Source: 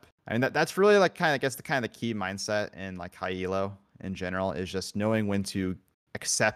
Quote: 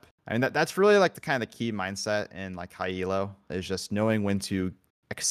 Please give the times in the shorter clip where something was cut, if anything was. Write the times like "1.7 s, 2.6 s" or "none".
1.1 s, 3.5 s

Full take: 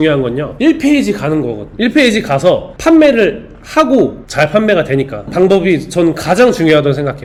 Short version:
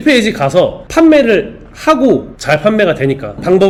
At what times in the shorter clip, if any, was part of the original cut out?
none

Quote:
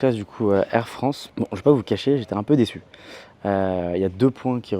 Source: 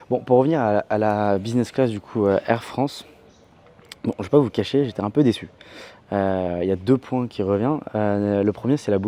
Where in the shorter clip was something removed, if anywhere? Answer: 1.2 s

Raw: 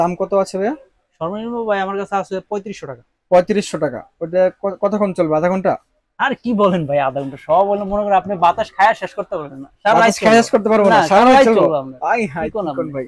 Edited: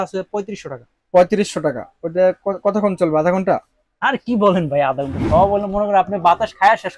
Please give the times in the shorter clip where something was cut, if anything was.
none

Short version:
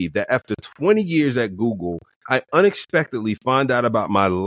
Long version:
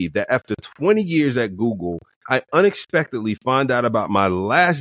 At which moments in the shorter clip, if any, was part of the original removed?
none

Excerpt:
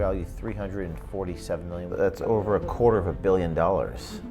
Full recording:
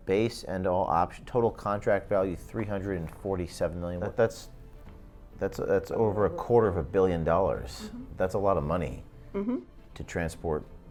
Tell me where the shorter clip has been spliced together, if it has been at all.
1.9 s

